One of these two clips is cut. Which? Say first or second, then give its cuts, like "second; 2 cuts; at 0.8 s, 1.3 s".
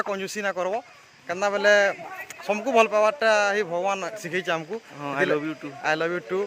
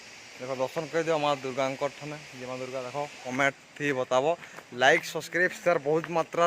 second; 1 cut; at 3.2 s